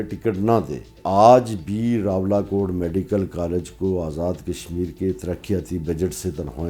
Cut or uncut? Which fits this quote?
cut